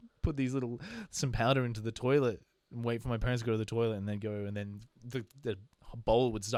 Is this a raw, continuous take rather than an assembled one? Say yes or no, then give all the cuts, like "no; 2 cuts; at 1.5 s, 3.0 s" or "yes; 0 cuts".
yes; 0 cuts